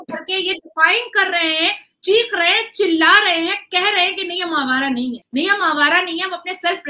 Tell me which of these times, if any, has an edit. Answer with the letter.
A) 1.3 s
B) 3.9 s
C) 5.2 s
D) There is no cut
C